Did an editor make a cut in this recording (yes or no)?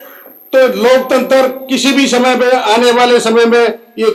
no